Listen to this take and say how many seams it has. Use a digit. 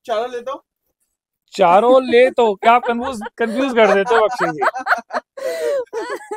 0